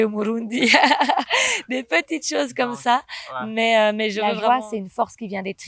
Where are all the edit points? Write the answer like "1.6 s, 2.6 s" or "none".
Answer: 4.2 s